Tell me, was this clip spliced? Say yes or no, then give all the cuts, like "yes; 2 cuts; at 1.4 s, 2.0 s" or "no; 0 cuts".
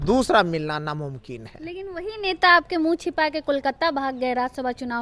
no; 0 cuts